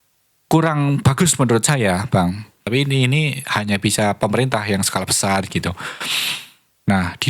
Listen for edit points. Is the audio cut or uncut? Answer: cut